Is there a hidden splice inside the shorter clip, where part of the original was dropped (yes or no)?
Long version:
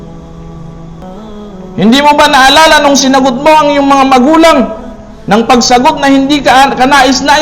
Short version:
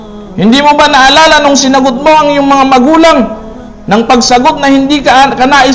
no